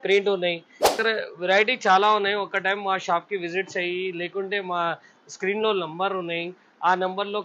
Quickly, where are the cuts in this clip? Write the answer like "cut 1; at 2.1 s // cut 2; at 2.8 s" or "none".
cut 1; at 1.0 s